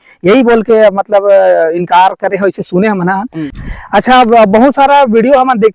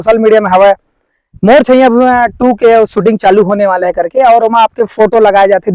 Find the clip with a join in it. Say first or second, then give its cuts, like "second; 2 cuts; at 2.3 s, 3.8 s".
first; 1 cut; at 3.5 s